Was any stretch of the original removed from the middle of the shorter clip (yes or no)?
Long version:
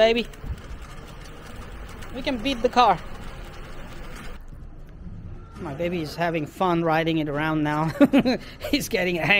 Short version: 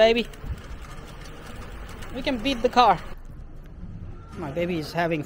yes